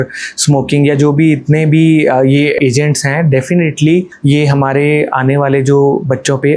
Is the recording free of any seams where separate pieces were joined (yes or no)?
no